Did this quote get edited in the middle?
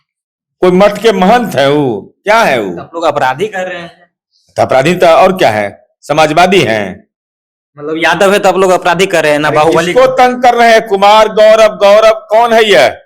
no; 0 cuts

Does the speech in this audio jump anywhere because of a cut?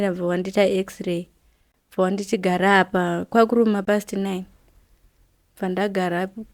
no; 0 cuts

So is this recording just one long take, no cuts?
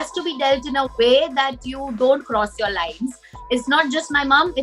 no; 1 cut; at 3.4 s

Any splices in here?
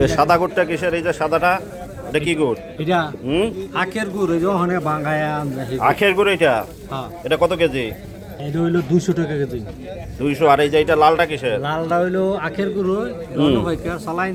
no; 0 cuts

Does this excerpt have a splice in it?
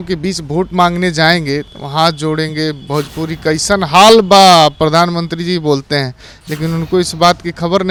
no; 0 cuts

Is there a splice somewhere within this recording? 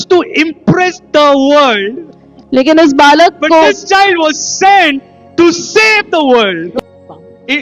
yes; 1 cut; at 6.7 s

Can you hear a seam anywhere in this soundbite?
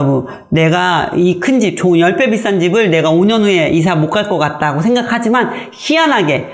no; 0 cuts

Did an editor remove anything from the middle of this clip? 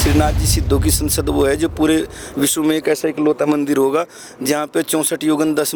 no; 0 cuts

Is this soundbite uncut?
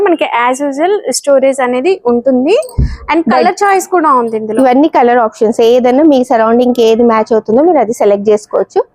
yes; 0 cuts

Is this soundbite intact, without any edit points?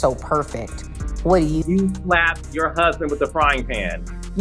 no; 1 cut; at 1.5 s

